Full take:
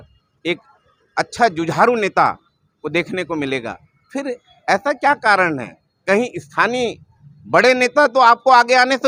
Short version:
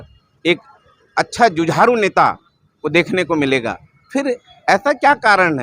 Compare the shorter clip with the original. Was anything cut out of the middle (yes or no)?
no